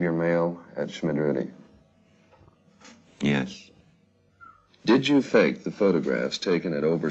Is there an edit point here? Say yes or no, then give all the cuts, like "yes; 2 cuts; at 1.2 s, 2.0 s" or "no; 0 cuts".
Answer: no; 0 cuts